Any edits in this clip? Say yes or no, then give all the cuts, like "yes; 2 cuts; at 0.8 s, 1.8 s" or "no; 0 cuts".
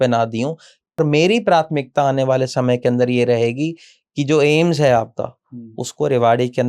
yes; 1 cut; at 1.0 s